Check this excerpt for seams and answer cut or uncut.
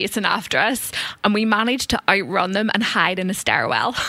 uncut